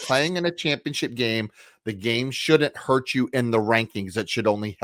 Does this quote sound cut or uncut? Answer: uncut